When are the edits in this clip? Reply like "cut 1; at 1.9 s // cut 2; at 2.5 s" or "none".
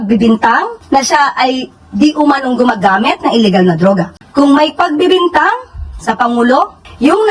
cut 1; at 4.2 s